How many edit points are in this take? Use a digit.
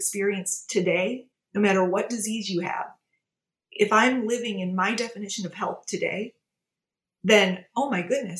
1